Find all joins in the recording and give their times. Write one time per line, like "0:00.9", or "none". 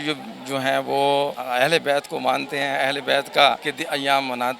0:01.4
0:03.7